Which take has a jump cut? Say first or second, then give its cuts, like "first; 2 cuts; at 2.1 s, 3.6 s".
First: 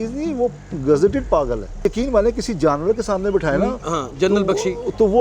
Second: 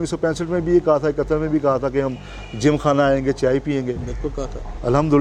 first; 1 cut; at 1.8 s